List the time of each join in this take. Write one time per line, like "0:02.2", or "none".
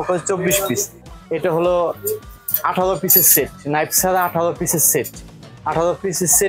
0:01.0

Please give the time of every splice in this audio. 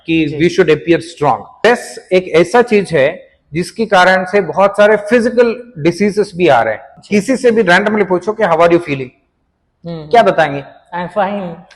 0:01.5
0:06.9

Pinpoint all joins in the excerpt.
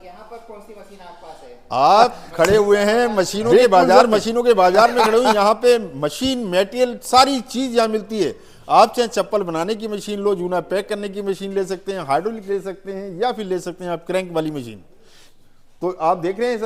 0:04.0

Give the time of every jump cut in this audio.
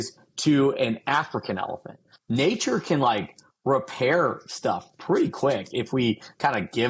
0:02.1

